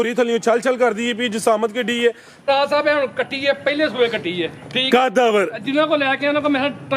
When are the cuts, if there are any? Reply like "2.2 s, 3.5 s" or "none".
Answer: 2.4 s